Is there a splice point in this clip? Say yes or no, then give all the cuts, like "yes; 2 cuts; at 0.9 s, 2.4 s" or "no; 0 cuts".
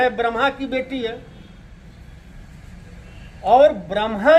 no; 0 cuts